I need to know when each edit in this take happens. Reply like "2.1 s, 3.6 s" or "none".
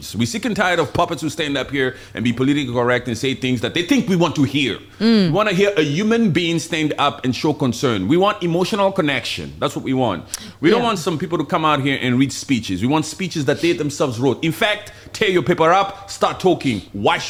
none